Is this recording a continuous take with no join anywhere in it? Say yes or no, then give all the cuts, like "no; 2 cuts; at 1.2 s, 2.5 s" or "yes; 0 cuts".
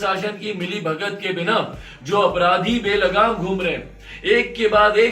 yes; 0 cuts